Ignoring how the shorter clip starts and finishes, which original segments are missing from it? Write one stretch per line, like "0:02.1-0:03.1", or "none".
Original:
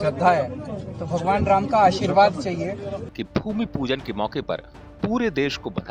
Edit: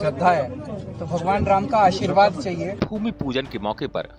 0:02.8-0:03.3